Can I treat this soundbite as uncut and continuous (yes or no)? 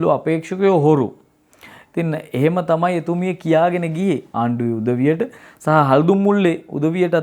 no